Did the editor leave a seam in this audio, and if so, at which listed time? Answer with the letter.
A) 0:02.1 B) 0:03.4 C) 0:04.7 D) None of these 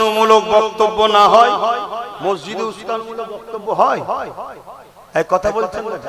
A